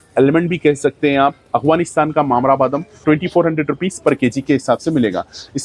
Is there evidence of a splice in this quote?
no; 0 cuts

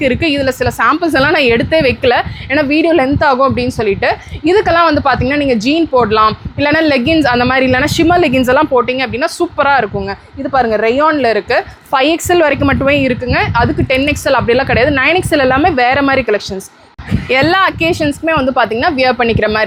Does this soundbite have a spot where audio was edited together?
no; 0 cuts

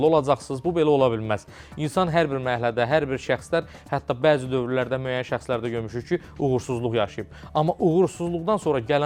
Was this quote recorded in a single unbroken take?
yes; 0 cuts

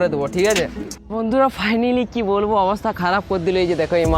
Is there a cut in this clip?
yes; 1 cut; at 1.0 s

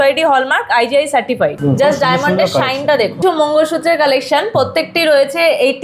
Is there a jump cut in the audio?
yes; 2 cuts; at 1.6 s, 3.2 s

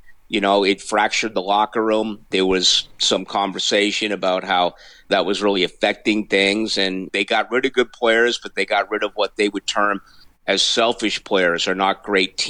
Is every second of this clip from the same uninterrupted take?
no; 3 cuts; at 2.3 s, 5.1 s, 7.1 s

